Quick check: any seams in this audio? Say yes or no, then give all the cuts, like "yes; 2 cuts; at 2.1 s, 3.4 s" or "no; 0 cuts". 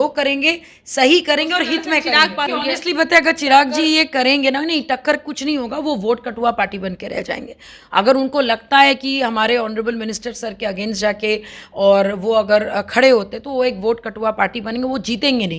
yes; 1 cut; at 2.5 s